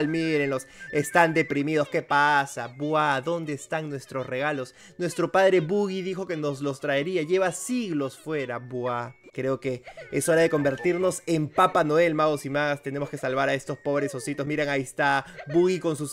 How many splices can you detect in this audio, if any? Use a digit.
0